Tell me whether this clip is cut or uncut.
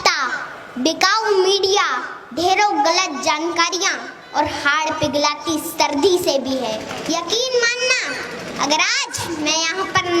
cut